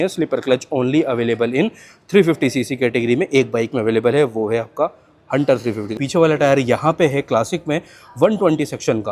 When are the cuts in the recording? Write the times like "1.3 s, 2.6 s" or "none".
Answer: 5.9 s